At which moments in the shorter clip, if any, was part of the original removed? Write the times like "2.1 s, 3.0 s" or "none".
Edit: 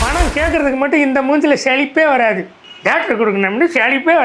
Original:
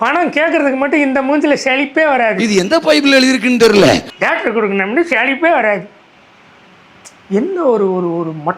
2.6 s